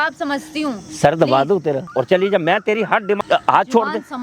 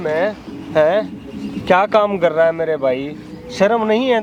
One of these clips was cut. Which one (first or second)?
first